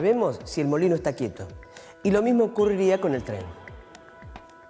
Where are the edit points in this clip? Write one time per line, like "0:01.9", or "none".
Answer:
0:03.0